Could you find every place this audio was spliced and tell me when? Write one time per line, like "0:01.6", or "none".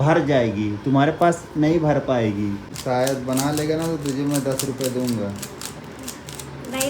0:02.7